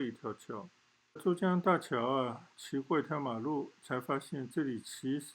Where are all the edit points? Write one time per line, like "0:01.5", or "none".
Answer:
0:01.2